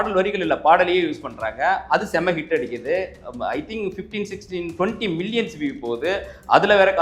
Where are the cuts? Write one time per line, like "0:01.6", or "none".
none